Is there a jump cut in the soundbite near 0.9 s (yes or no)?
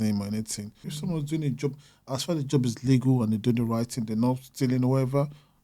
yes